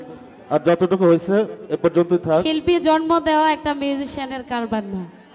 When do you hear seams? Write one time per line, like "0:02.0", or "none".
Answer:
none